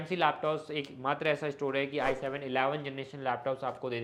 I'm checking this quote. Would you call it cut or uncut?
uncut